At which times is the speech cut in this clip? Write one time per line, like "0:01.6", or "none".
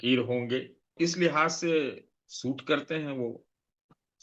0:00.9